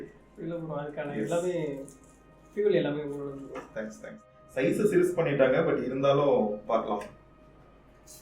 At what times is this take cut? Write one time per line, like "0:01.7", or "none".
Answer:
0:04.4